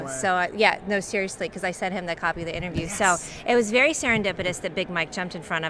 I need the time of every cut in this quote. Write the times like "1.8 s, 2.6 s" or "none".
3.0 s

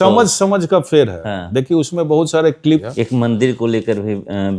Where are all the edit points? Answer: 2.9 s

